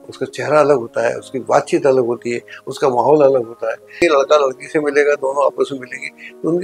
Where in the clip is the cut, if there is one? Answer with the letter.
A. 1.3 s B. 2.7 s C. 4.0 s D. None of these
C